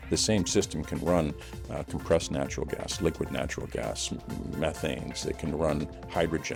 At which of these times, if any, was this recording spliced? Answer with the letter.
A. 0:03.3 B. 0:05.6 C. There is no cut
C